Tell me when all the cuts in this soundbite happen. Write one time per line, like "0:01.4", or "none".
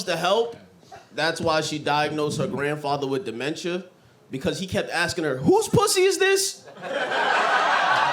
none